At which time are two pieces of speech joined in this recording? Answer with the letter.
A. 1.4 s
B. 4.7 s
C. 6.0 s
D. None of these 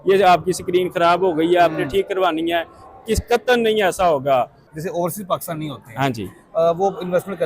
B